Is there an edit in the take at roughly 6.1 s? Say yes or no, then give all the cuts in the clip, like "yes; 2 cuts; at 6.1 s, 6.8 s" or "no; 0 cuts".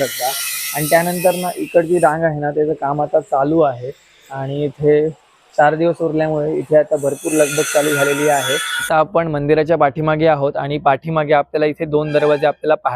no; 1 cut; at 8.7 s